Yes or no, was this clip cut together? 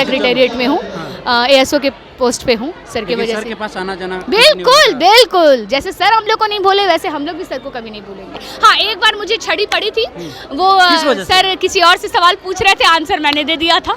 yes